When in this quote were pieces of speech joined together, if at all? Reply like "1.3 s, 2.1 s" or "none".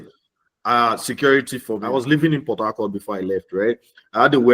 1.8 s

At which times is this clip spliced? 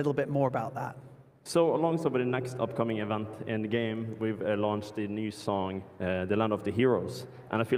none

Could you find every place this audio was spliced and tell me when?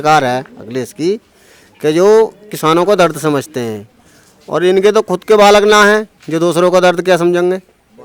none

